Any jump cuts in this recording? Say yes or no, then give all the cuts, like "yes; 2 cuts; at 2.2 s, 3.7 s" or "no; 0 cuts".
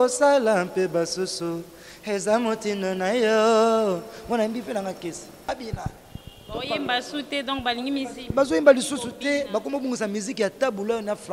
yes; 1 cut; at 5.5 s